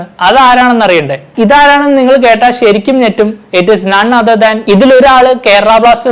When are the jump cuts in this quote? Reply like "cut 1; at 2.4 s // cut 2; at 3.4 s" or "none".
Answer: cut 1; at 1.3 s // cut 2; at 4.6 s